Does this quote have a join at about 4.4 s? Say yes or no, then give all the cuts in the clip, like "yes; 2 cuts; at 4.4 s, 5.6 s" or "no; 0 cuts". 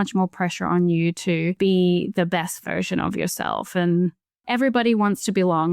yes; 2 cuts; at 1.6 s, 4.4 s